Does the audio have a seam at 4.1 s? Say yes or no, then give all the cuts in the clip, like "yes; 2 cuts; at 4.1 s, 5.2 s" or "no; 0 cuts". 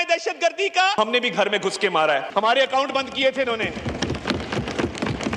no; 2 cuts; at 1.0 s, 2.3 s